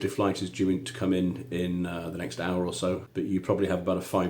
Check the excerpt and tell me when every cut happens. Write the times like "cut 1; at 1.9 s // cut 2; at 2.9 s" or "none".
cut 1; at 3.1 s